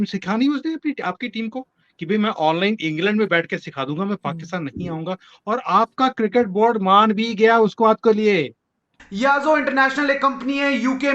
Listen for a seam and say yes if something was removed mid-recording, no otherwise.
yes